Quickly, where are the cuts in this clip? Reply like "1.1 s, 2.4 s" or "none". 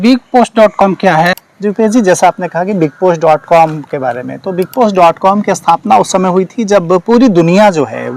1.3 s